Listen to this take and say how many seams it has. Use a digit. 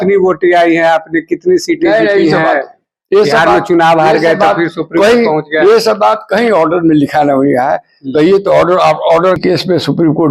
1